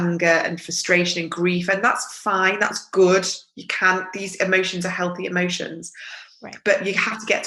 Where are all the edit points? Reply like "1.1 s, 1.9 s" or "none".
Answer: none